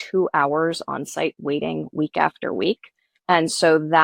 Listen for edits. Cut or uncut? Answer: cut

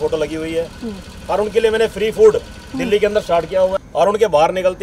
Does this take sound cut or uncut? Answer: cut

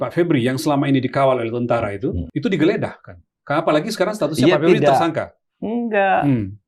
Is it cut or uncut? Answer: cut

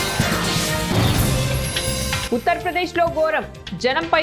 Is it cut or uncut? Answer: cut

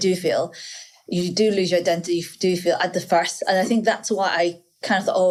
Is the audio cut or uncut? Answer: uncut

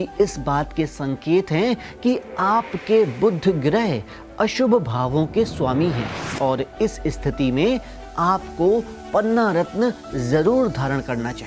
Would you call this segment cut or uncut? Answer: uncut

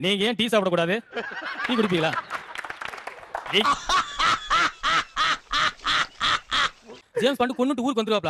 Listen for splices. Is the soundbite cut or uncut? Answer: uncut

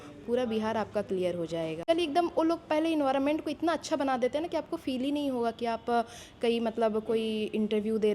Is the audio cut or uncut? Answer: cut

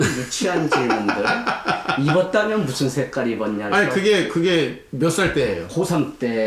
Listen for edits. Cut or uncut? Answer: uncut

